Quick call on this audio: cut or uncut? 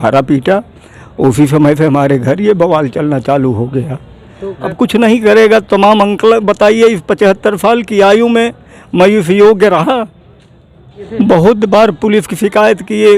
cut